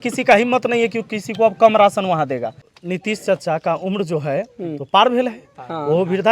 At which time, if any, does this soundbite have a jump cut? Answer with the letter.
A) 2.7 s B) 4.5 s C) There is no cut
A